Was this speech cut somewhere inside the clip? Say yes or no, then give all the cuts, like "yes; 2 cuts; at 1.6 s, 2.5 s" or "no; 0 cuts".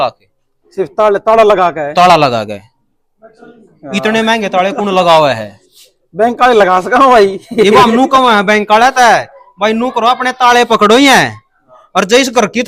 no; 0 cuts